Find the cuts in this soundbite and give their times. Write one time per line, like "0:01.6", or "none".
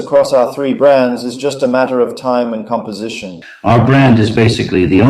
0:03.4